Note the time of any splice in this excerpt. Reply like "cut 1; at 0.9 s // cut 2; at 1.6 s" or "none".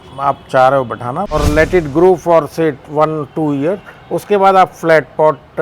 cut 1; at 1.3 s